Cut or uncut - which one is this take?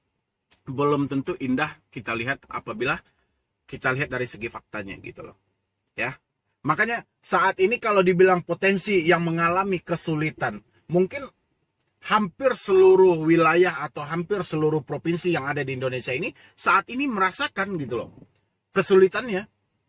uncut